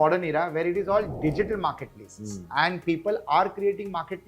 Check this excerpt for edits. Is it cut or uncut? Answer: uncut